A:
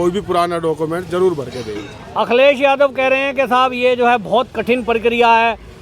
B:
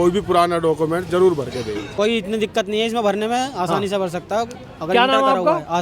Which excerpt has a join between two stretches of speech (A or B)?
B